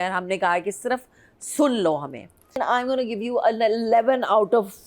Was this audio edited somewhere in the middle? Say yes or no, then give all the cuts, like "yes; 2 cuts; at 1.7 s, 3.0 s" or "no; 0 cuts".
yes; 1 cut; at 2.5 s